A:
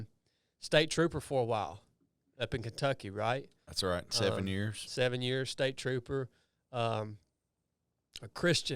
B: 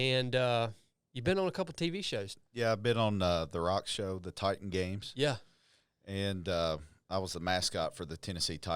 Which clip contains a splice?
B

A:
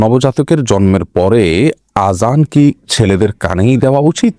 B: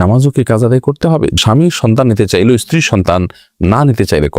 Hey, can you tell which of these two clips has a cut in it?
B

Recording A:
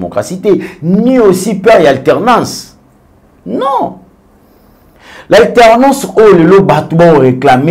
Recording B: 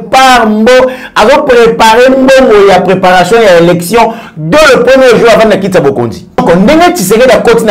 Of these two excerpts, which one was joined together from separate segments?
B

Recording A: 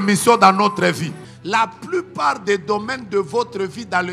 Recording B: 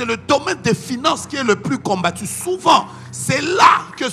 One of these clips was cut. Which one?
A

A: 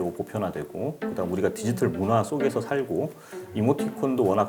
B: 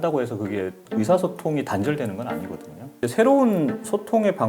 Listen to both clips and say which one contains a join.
B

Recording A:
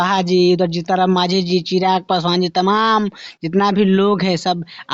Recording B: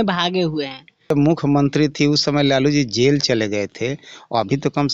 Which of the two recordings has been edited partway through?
B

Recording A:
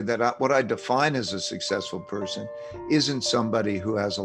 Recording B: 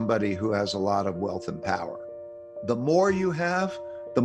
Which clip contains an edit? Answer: B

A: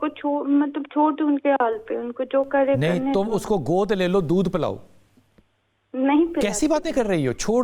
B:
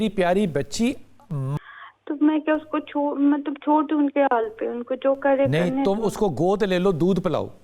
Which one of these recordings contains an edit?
B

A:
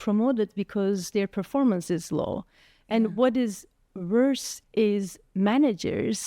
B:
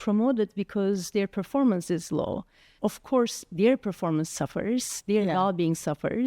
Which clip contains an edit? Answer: B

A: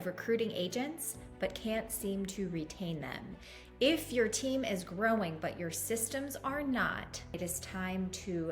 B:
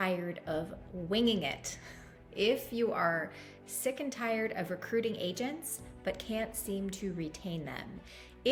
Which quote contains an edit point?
A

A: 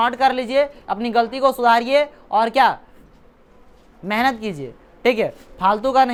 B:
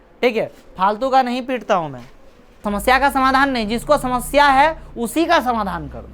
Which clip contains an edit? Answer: B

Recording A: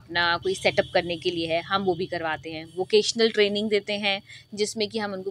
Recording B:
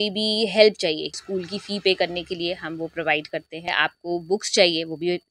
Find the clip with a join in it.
B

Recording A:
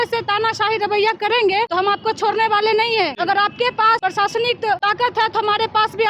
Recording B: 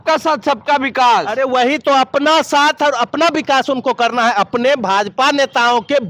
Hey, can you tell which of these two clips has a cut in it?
A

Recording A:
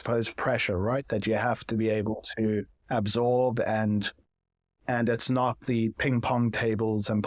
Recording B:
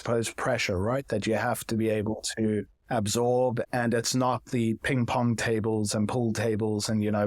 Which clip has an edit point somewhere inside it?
B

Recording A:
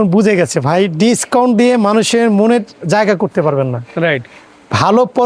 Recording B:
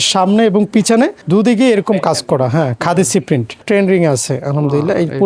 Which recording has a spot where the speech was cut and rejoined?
B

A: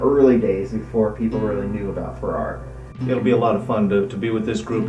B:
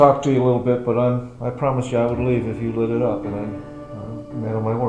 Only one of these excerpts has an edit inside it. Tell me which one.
A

